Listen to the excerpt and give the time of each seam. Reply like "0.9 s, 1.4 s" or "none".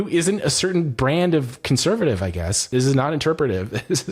2.7 s